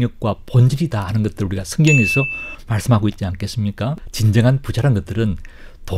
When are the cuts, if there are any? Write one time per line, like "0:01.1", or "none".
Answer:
0:04.0